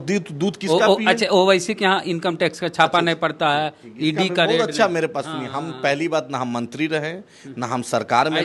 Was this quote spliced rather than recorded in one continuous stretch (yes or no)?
no